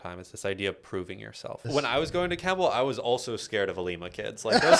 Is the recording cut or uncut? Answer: cut